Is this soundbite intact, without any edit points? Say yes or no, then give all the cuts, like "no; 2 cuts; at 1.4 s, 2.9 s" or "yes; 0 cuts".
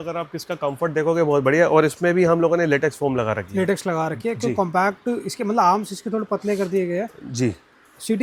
yes; 0 cuts